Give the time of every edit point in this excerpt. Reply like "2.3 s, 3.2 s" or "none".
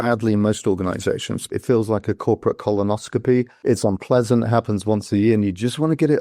1.5 s, 3.5 s